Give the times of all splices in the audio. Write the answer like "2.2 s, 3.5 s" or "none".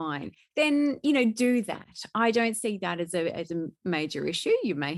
none